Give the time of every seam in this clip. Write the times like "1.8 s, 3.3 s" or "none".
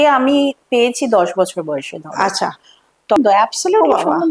3.2 s